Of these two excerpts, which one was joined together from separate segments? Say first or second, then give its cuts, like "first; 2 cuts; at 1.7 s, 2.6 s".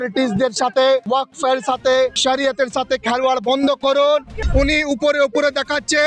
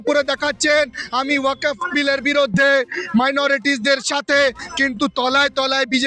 first; 3 cuts; at 1.0 s, 2.2 s, 4.4 s